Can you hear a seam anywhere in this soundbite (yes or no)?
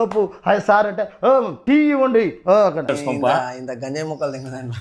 yes